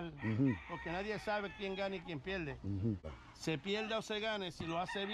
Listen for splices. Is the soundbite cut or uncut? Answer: cut